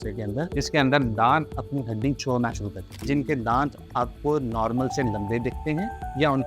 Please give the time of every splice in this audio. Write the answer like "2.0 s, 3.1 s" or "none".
3.0 s